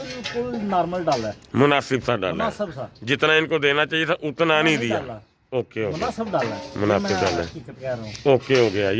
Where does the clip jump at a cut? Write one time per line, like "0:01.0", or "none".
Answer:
none